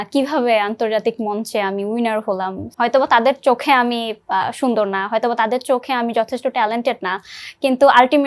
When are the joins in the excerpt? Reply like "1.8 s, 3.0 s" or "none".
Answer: 2.6 s